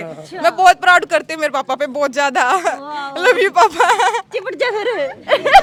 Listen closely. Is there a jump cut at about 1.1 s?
no; 0 cuts

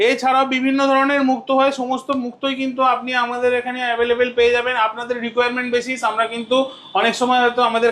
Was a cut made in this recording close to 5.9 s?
no; 0 cuts

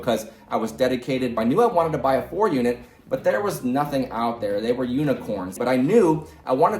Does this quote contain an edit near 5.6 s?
yes; 2 cuts; at 1.3 s, 5.6 s

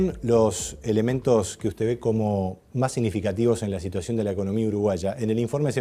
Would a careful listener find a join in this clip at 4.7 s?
yes; 1 cut; at 4.7 s

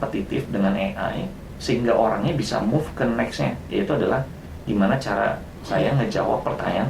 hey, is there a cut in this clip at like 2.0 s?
no; 0 cuts

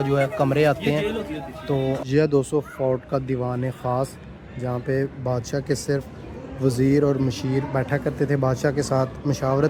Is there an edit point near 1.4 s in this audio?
no; 0 cuts

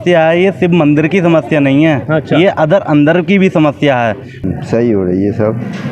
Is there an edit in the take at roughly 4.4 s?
yes; 1 cut; at 4.4 s

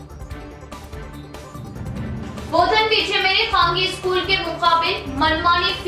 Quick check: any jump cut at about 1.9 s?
no; 0 cuts

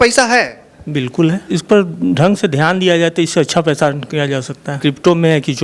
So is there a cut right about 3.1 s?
no; 2 cuts; at 1.4 s, 4.8 s

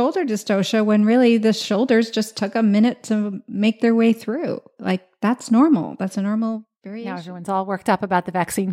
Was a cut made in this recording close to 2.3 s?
no; 1 cut; at 6.8 s

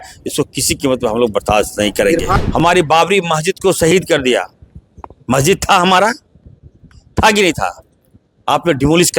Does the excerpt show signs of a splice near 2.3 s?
yes; 1 cut; at 2.3 s

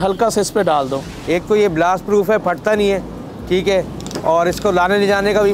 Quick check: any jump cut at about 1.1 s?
yes; 1 cut; at 1.1 s

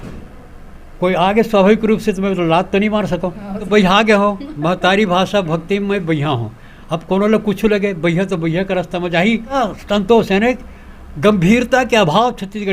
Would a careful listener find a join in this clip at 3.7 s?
yes; 2 cuts; at 3.7 s, 9.5 s

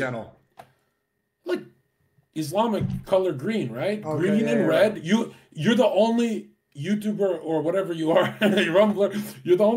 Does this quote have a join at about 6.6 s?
no; 0 cuts

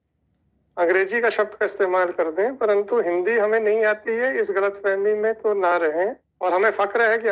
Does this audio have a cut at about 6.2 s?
yes; 1 cut; at 6.2 s

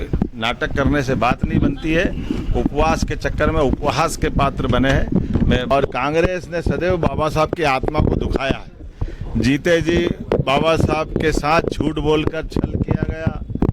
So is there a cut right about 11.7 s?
no; 1 cut; at 5.7 s

